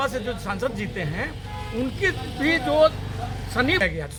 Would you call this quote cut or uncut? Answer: uncut